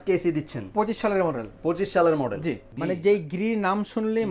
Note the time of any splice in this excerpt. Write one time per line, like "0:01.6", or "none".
0:02.7